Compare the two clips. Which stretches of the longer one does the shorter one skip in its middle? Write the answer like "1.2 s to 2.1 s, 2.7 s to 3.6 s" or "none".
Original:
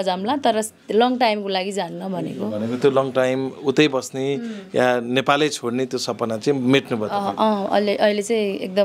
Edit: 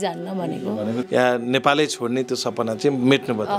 2.8 s to 4.6 s